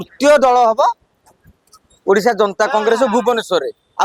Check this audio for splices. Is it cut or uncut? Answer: uncut